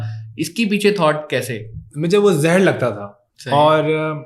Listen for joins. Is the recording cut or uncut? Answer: cut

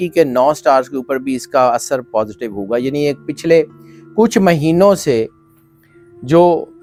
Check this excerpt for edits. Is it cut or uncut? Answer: uncut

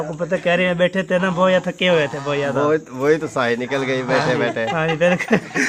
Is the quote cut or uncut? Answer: uncut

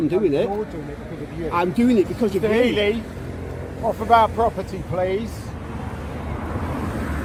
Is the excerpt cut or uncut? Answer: uncut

